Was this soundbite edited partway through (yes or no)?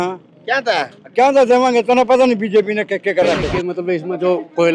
yes